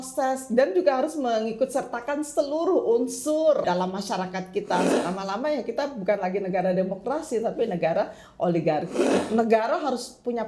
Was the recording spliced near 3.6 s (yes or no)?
yes